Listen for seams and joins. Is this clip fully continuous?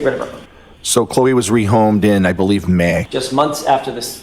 no; 1 cut; at 3.1 s

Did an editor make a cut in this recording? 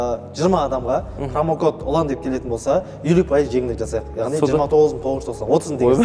no; 0 cuts

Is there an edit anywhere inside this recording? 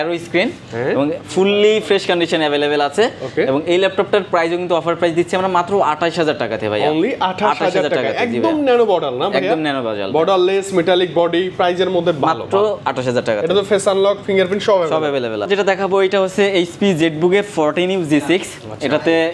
no; 0 cuts

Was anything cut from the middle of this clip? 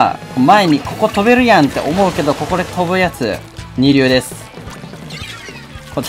no; 0 cuts

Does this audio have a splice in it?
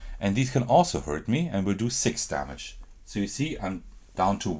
no; 0 cuts

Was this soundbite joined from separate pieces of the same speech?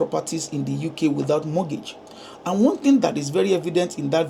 no; 0 cuts

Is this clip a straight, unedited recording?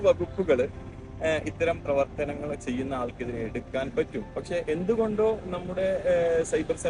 yes; 0 cuts

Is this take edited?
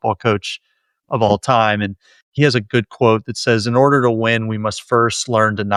no; 0 cuts

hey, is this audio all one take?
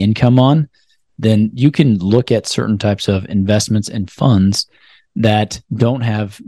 yes; 0 cuts

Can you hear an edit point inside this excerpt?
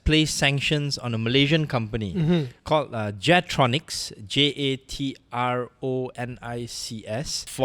no; 0 cuts

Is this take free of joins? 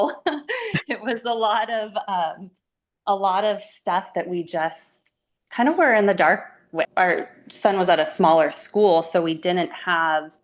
no; 1 cut; at 6.9 s

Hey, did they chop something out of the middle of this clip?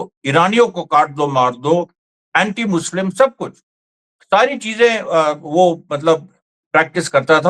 no; 0 cuts

